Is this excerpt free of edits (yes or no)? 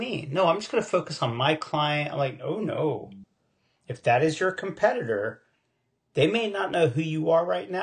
yes